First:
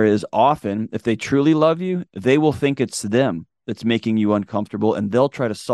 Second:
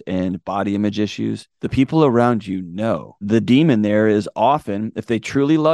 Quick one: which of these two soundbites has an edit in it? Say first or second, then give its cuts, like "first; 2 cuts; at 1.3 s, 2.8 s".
second; 2 cuts; at 1.5 s, 2.9 s